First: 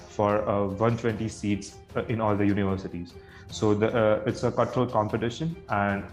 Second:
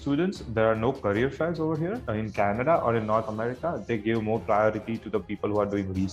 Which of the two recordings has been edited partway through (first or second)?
second